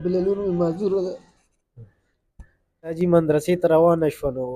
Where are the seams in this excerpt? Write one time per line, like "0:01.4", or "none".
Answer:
0:02.9